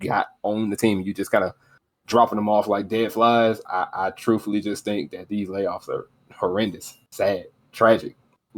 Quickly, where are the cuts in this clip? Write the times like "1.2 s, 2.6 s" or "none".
none

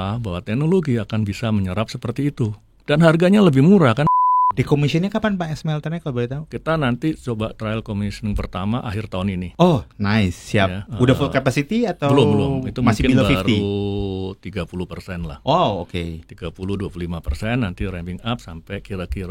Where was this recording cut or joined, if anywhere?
4.0 s, 6.5 s, 9.5 s, 10.8 s

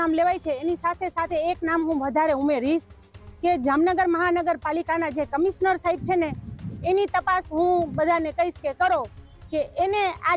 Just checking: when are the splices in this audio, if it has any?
none

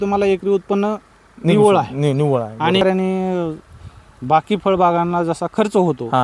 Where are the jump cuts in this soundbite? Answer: 2.8 s

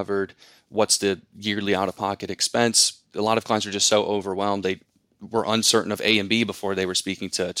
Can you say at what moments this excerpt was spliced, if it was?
3.1 s

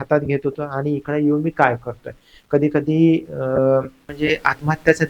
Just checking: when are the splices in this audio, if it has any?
4.1 s

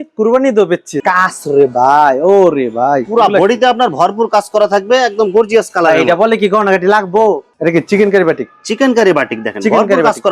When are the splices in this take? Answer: 0.9 s, 7.5 s

